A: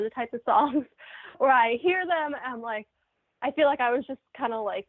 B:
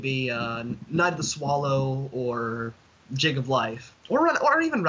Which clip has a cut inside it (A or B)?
B